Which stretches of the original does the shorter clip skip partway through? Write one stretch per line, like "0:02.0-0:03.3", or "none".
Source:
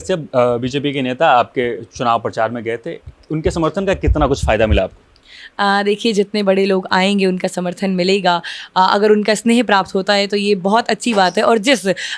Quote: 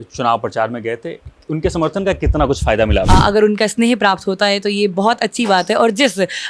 0:04.9-0:08.7